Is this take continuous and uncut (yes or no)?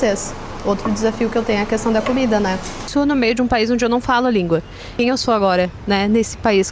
no